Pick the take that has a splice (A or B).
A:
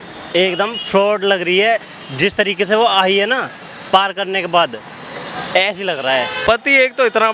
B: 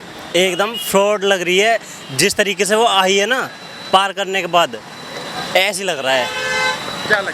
A